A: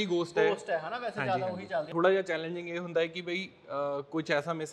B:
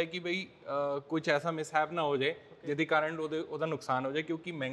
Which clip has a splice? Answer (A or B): A